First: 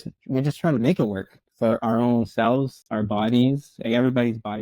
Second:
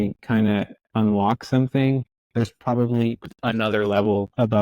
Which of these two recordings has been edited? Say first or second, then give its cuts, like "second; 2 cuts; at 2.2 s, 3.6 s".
second; 1 cut; at 2.2 s